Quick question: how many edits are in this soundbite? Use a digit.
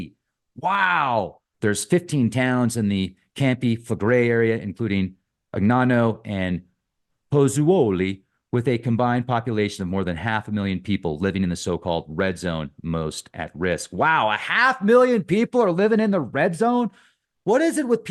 1